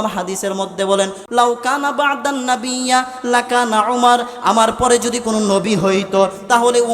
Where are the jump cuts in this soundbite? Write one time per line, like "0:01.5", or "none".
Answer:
0:01.2